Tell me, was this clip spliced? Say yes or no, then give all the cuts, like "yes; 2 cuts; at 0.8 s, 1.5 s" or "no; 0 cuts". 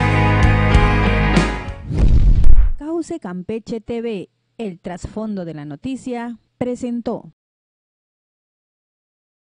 no; 0 cuts